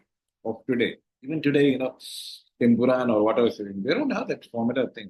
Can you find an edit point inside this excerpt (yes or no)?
yes